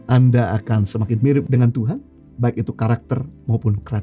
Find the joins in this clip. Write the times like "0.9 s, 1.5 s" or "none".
1.5 s